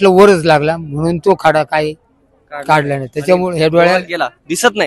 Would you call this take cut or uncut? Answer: uncut